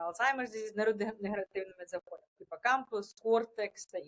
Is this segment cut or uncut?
uncut